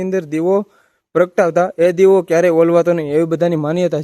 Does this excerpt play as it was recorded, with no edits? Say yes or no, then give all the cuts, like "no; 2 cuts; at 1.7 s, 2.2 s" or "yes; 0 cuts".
yes; 0 cuts